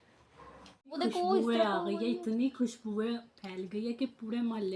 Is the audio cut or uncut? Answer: cut